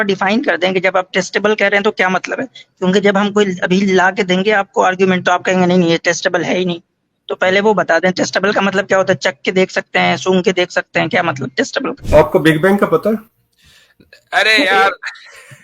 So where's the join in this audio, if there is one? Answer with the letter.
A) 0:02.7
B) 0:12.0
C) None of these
B